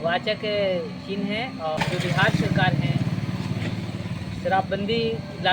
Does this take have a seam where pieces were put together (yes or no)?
yes